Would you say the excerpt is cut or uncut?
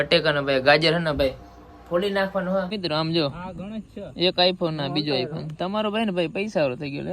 cut